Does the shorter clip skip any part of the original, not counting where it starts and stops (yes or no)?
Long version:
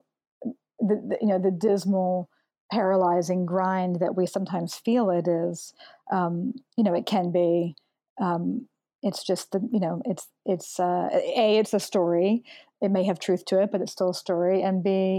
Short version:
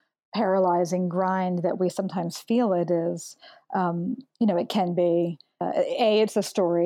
yes